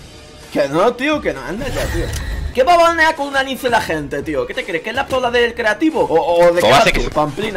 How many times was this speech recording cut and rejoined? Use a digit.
1